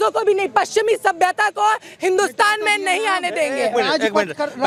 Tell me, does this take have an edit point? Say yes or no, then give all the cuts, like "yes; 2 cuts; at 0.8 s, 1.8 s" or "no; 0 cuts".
no; 0 cuts